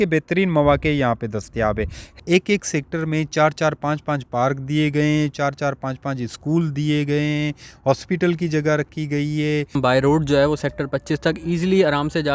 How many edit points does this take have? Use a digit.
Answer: 2